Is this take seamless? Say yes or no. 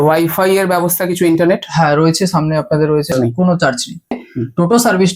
no